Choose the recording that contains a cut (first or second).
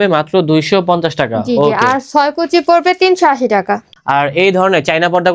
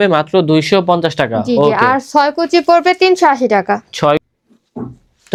first